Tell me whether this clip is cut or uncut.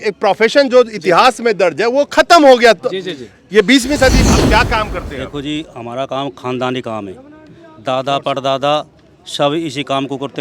cut